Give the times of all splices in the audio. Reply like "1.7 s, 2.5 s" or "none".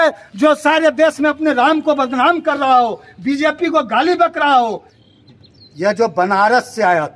4.9 s